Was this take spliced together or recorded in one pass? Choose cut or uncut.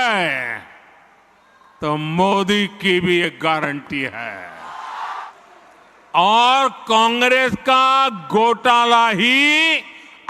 cut